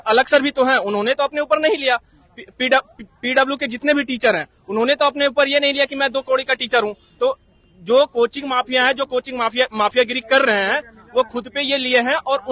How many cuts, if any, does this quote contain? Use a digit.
0